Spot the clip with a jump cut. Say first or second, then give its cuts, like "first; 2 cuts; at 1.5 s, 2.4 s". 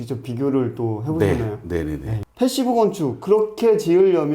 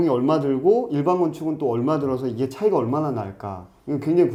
first; 1 cut; at 2.2 s